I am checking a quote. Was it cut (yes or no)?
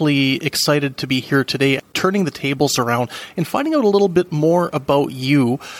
yes